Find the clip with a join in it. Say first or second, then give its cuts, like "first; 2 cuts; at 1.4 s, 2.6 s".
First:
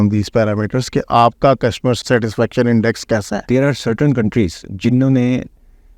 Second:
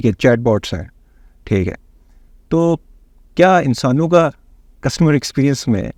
first; 2 cuts; at 2.0 s, 3.5 s